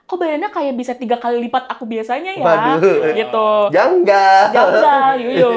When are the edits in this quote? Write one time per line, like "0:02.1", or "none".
none